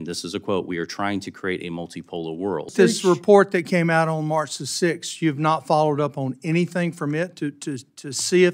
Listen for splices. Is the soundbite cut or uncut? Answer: cut